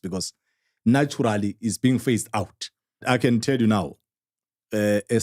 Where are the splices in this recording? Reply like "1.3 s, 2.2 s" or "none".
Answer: 3.0 s